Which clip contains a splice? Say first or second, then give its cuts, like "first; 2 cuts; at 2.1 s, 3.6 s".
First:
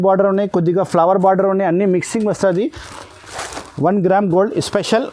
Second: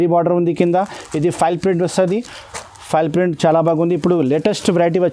first; 1 cut; at 2.9 s